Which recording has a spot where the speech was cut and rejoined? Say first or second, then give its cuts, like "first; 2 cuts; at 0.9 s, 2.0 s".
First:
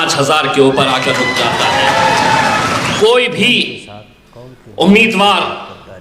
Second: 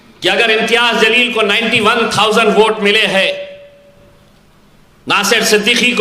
first; 1 cut; at 2.9 s